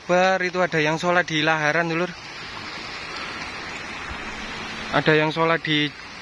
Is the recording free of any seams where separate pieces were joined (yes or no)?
yes